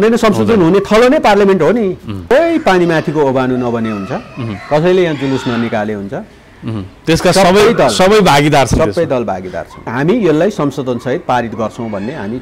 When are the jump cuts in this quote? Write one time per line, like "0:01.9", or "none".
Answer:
0:02.3
0:09.9